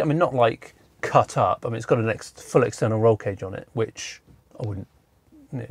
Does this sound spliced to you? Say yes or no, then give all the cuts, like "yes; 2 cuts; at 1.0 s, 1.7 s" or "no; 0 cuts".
no; 0 cuts